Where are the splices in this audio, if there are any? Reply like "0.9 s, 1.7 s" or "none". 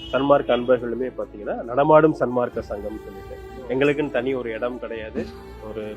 none